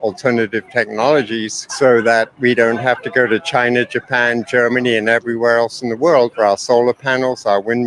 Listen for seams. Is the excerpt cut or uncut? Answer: cut